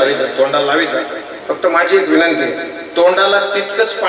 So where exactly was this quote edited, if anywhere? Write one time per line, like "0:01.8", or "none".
none